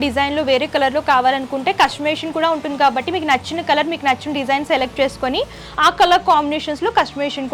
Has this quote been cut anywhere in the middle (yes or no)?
no